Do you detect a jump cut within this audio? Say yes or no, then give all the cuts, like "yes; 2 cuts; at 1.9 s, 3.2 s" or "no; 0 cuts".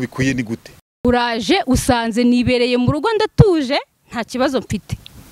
yes; 1 cut; at 1.0 s